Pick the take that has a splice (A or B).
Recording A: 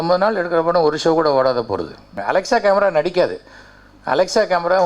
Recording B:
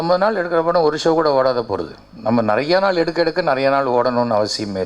A